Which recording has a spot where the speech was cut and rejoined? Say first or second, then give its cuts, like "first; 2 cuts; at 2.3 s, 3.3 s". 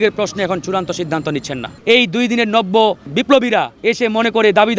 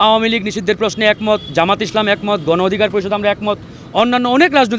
first; 2 cuts; at 1.8 s, 3.2 s